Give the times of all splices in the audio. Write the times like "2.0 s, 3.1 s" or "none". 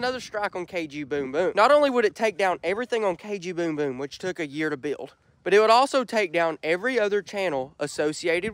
1.5 s